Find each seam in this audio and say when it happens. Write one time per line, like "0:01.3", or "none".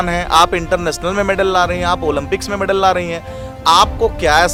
none